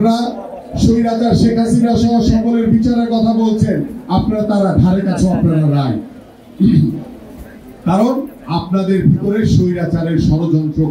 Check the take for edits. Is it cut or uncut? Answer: uncut